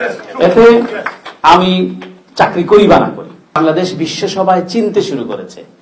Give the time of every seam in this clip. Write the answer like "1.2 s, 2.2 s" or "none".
3.6 s